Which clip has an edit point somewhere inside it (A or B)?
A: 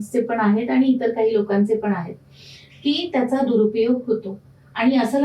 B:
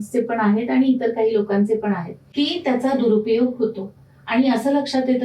B